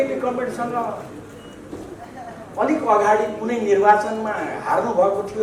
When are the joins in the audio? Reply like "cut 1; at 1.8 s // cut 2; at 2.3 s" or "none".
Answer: none

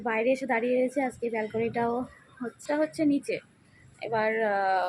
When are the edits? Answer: cut 1; at 2.6 s

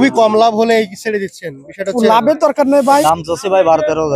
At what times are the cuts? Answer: cut 1; at 3.0 s

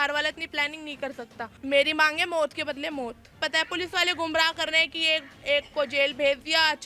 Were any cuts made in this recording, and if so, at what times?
cut 1; at 1.5 s // cut 2; at 3.4 s

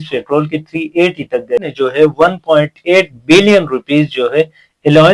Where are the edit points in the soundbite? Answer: cut 1; at 1.7 s

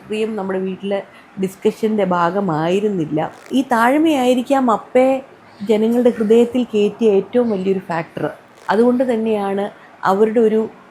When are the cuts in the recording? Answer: cut 1; at 3.4 s // cut 2; at 8.5 s

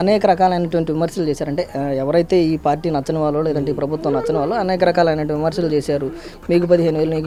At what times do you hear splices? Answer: none

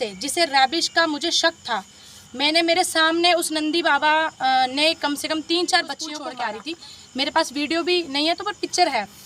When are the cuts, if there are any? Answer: cut 1; at 6.2 s

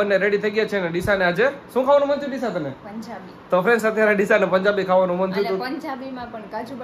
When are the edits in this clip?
none

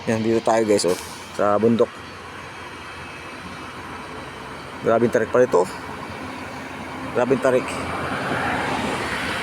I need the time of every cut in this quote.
none

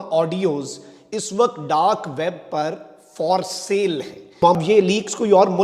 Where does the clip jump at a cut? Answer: cut 1; at 4.6 s

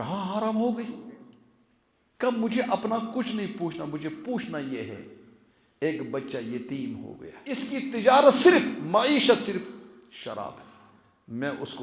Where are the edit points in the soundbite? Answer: cut 1; at 7.7 s

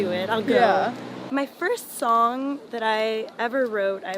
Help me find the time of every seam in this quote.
cut 1; at 1.2 s

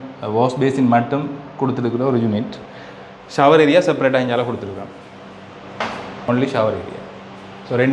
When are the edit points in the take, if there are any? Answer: cut 1; at 6.3 s

